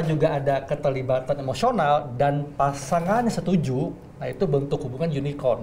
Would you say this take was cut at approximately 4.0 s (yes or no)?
no